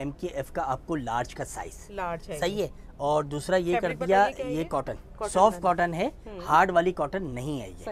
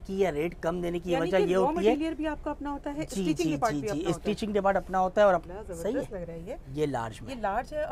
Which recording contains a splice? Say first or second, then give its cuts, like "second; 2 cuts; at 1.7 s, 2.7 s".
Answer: second; 1 cut; at 5.4 s